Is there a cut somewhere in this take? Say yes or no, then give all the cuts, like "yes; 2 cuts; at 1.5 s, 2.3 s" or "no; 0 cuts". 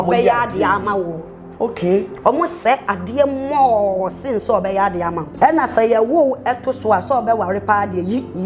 yes; 1 cut; at 5.2 s